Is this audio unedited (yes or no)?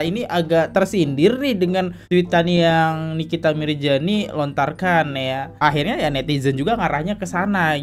yes